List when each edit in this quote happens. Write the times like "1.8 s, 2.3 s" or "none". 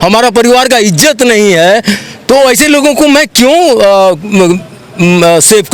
none